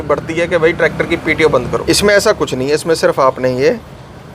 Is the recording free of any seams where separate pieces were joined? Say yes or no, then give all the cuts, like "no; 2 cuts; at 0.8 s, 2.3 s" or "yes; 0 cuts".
no; 1 cut; at 1.8 s